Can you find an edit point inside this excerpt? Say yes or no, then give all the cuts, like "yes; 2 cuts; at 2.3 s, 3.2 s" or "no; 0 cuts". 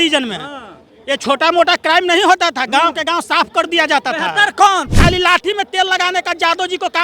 yes; 1 cut; at 4.9 s